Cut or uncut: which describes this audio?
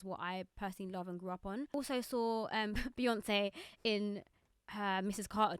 cut